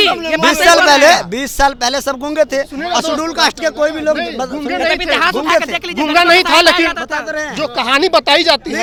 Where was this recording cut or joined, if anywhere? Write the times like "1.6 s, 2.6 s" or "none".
none